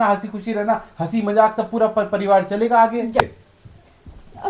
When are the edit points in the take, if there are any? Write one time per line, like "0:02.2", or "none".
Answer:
0:03.2